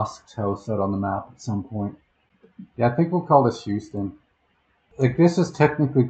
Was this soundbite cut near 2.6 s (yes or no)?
no